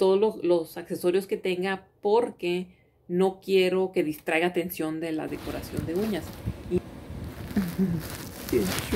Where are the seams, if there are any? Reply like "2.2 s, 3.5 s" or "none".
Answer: 6.8 s